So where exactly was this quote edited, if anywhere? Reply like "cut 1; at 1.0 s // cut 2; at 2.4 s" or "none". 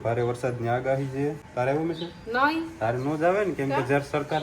cut 1; at 1.4 s